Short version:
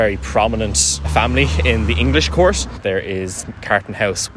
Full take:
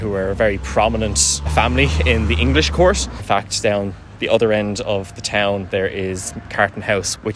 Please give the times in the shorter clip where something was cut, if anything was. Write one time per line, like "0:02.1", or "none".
0:02.8